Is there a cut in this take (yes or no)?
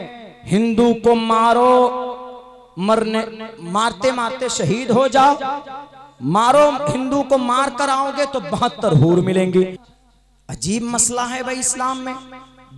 yes